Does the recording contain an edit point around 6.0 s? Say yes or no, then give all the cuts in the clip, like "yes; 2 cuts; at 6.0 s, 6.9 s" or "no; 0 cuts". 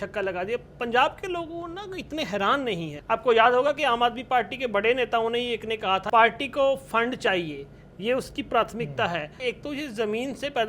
yes; 3 cuts; at 2.9 s, 6.0 s, 9.4 s